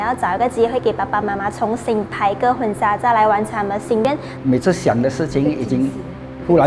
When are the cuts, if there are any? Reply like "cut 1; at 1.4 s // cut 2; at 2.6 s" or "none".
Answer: cut 1; at 4.0 s